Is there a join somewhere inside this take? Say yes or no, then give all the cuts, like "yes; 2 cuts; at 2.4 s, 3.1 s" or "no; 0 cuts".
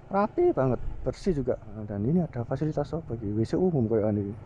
yes; 1 cut; at 1.9 s